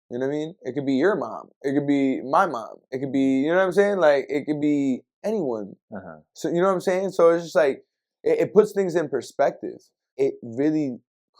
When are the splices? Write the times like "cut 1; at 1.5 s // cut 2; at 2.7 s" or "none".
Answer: cut 1; at 10.0 s